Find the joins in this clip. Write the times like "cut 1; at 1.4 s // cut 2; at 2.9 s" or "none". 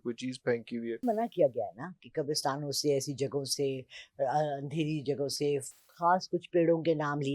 cut 1; at 1.0 s